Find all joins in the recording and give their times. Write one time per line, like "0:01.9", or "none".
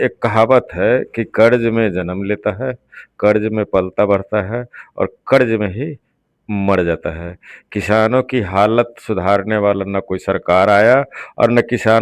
none